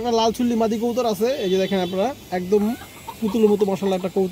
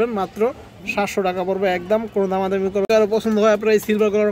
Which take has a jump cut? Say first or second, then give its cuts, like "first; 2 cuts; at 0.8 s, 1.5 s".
second; 1 cut; at 2.9 s